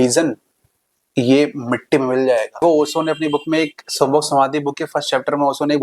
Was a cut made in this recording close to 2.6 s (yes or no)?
yes